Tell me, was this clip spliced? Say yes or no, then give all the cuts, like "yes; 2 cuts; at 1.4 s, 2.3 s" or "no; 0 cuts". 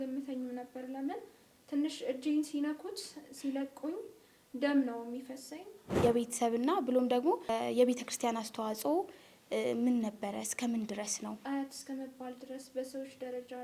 yes; 3 cuts; at 5.9 s, 7.5 s, 11.4 s